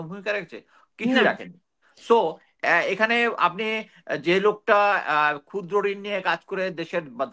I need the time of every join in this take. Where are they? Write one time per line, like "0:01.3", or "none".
none